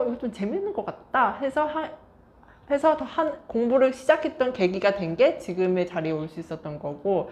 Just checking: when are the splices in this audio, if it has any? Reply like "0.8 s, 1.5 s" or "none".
none

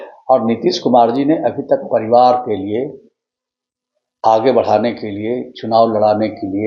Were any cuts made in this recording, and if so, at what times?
none

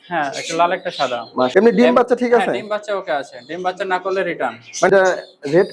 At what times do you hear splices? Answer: 1.5 s, 4.9 s

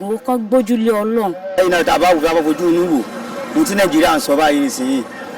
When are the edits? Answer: 1.6 s

